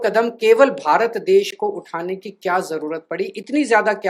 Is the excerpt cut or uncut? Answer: uncut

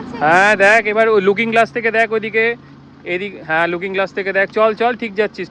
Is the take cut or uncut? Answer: uncut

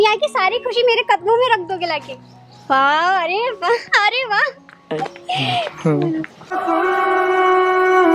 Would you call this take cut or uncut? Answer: cut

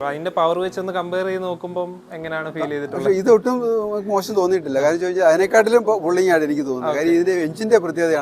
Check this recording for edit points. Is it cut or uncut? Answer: uncut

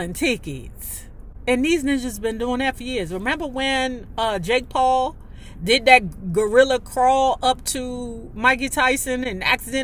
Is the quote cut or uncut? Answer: uncut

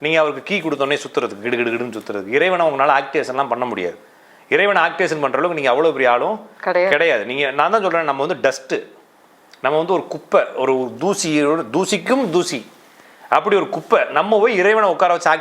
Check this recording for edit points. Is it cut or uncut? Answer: uncut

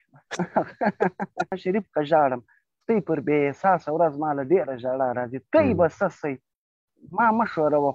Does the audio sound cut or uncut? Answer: cut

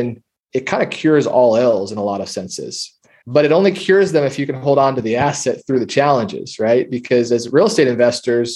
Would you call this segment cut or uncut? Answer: uncut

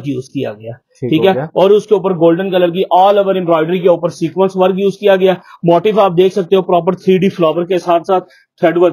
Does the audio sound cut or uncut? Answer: uncut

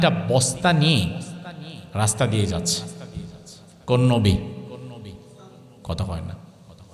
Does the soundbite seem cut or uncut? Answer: uncut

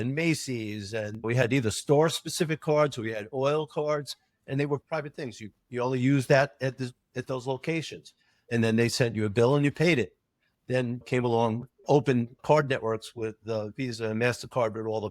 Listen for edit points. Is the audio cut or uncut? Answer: cut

